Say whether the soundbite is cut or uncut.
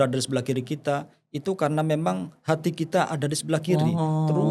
uncut